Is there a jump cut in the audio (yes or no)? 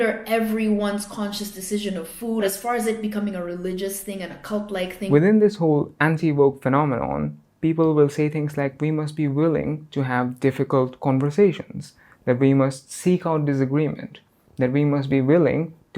yes